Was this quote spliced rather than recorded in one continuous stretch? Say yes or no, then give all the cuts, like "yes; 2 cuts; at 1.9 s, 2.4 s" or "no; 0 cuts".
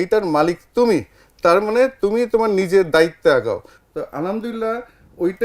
no; 0 cuts